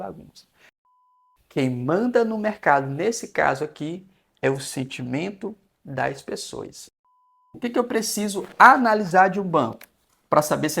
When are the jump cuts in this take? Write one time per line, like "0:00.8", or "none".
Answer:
0:00.9
0:07.6

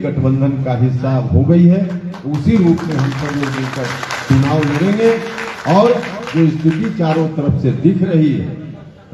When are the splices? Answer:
none

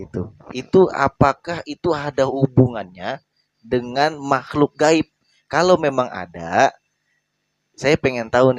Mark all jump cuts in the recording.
none

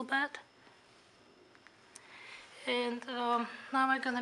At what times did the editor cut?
0:02.8

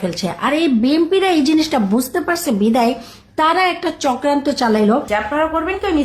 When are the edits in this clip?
0:05.1

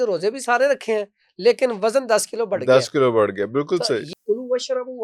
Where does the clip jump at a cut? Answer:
0:04.1

